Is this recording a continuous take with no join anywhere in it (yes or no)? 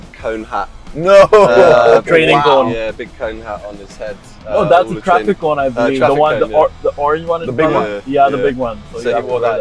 yes